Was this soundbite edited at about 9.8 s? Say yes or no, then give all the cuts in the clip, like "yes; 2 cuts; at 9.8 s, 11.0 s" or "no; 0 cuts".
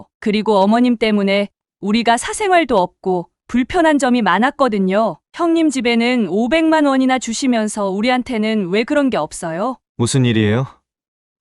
yes; 1 cut; at 9.8 s